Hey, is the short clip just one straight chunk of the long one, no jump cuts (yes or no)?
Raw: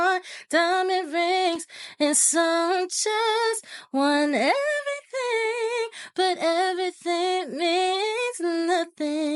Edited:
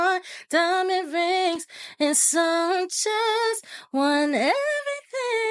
yes